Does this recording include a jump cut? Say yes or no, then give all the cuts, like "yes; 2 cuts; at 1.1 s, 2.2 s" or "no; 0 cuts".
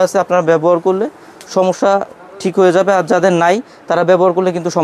no; 0 cuts